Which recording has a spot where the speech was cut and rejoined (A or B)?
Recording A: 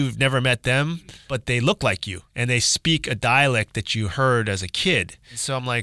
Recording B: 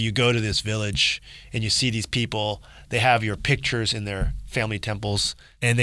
A